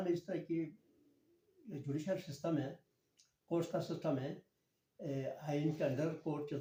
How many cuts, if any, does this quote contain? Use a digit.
0